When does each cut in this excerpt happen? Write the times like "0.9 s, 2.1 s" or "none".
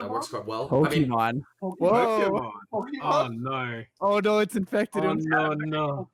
none

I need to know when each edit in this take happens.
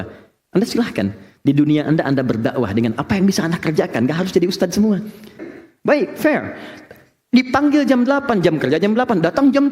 5.5 s

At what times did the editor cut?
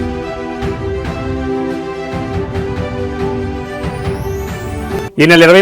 4.5 s

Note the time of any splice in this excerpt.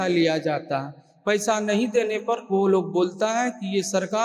none

